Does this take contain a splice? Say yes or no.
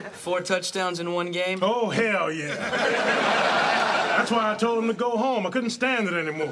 no